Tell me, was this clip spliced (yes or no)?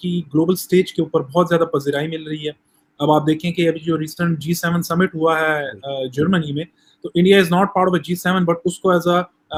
no